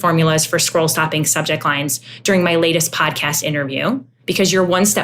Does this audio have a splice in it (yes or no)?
yes